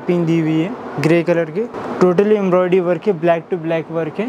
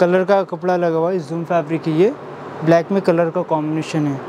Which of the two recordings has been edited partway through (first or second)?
first